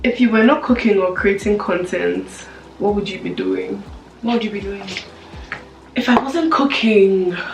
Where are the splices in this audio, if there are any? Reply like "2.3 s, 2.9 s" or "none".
none